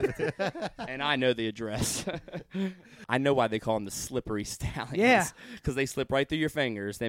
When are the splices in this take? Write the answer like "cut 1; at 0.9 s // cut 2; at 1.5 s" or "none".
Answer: cut 1; at 3.0 s